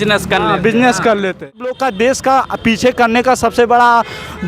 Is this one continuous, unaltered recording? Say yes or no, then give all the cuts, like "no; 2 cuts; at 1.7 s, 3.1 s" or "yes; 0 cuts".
no; 1 cut; at 1.8 s